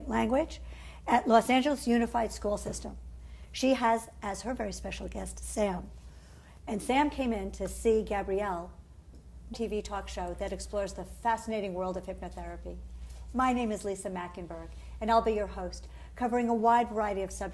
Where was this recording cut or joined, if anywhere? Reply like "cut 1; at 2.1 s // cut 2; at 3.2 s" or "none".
none